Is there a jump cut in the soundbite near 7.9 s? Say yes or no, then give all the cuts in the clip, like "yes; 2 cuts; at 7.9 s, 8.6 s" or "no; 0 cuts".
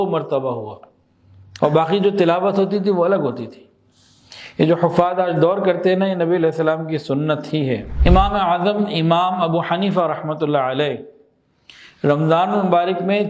yes; 1 cut; at 7.9 s